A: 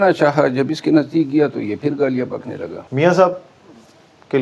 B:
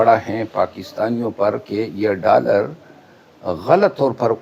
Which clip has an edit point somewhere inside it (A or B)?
A